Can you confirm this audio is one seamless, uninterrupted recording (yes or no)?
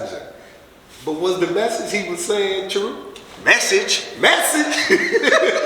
yes